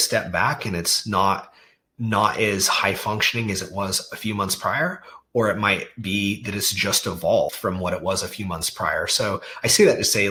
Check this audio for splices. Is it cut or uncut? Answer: uncut